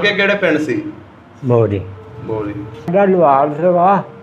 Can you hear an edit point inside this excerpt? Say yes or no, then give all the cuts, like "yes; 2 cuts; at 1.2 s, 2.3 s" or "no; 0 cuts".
yes; 1 cut; at 2.9 s